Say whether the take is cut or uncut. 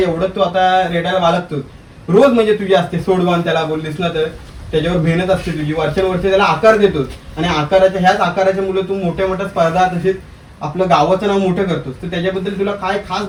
uncut